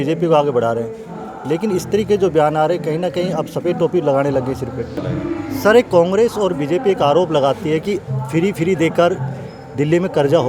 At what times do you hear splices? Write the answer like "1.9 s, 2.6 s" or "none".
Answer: 5.0 s